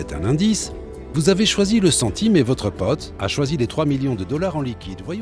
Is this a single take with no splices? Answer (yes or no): yes